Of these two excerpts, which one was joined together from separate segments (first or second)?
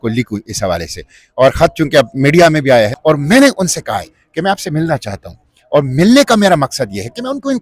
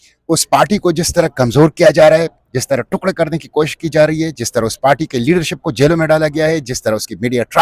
first